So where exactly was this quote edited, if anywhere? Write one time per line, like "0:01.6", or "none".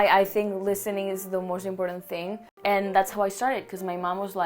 0:02.4